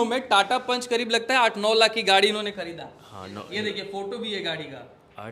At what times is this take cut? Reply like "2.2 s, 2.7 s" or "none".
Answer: none